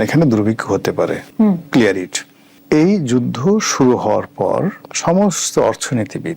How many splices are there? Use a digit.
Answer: 0